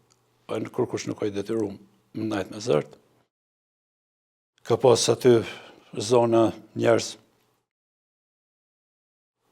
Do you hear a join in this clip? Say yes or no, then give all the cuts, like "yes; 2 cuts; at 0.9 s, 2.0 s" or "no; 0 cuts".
no; 0 cuts